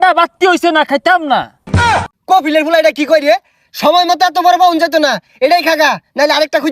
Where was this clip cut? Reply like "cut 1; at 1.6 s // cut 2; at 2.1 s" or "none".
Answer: cut 1; at 1.8 s